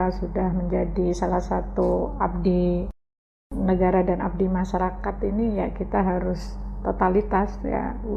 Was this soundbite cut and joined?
no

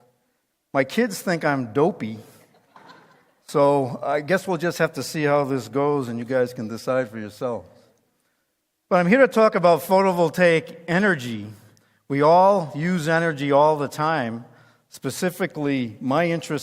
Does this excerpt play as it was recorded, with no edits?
no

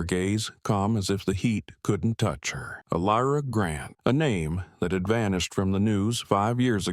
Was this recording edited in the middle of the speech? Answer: yes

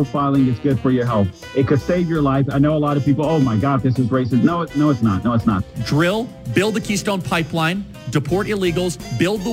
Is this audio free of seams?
no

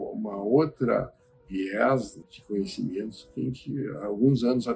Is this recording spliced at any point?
no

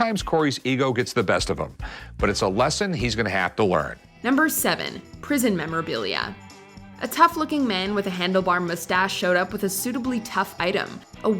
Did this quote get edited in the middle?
no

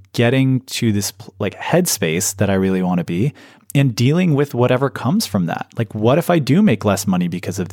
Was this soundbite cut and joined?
no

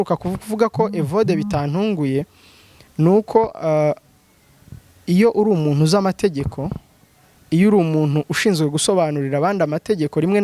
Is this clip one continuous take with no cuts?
yes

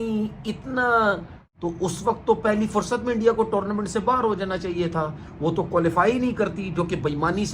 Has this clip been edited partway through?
yes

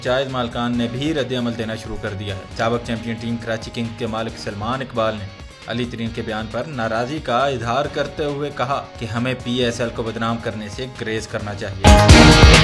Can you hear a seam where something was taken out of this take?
yes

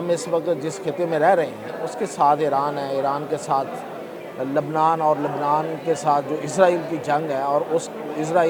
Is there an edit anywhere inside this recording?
no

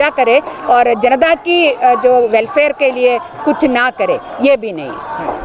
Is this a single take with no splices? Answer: yes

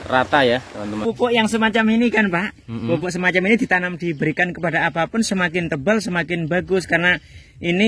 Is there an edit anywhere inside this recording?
yes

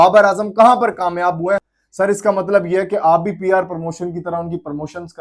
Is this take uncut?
no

